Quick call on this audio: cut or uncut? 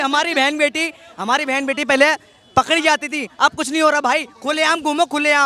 uncut